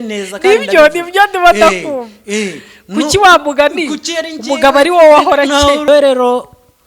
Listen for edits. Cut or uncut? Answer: cut